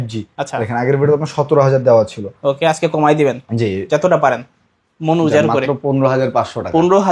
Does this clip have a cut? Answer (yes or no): no